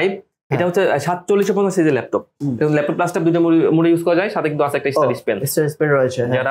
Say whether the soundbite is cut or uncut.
cut